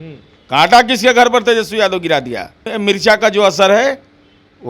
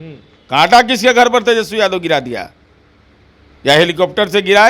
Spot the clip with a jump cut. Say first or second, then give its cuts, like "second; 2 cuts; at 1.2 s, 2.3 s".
first; 1 cut; at 2.7 s